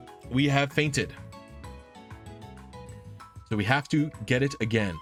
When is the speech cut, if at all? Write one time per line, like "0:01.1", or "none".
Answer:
none